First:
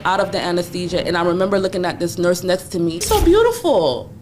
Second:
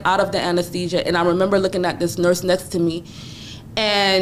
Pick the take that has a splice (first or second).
first